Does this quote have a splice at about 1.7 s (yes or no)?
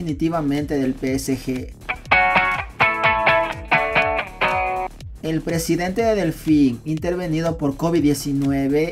yes